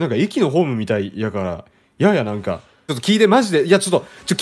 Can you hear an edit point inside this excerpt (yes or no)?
yes